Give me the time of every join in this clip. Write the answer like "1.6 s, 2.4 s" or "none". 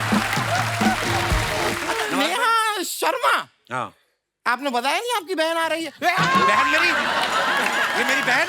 2.1 s